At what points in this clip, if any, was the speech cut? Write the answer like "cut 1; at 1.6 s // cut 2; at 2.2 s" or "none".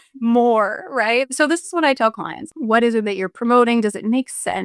cut 1; at 1.3 s // cut 2; at 2.5 s